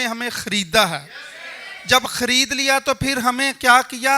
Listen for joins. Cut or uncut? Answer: uncut